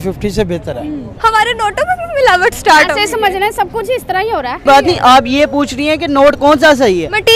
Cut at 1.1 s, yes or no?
yes